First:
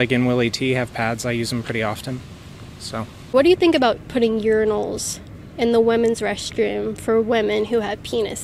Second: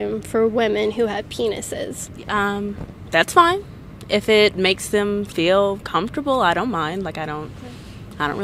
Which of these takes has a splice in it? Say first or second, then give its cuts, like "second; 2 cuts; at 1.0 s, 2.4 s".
first; 1 cut; at 3.2 s